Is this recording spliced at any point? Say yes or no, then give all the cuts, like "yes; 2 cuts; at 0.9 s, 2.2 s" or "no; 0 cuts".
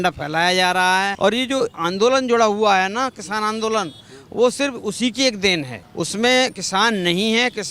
yes; 2 cuts; at 1.1 s, 5.8 s